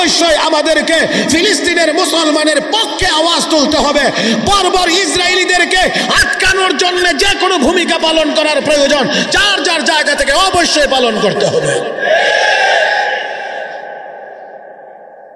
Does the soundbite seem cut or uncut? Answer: uncut